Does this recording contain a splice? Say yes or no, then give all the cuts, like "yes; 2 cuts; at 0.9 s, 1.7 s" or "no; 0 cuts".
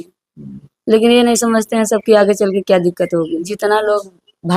yes; 1 cut; at 3.5 s